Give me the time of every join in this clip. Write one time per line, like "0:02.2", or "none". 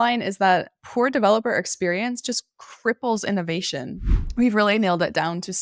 0:03.9